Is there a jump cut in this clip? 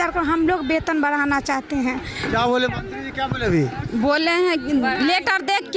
no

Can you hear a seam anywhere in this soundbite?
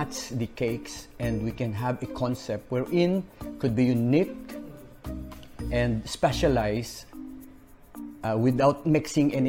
yes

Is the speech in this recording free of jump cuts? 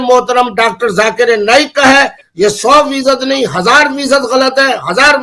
yes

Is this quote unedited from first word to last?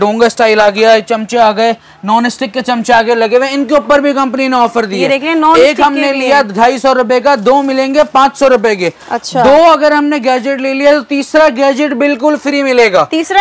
yes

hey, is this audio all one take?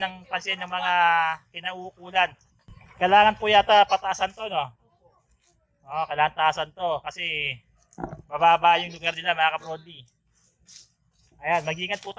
yes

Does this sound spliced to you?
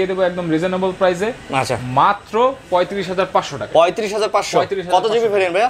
no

